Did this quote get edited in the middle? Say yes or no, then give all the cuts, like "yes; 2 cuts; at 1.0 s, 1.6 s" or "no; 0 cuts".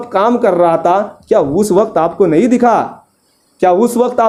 no; 0 cuts